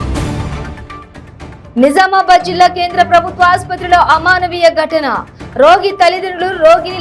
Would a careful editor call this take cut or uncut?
cut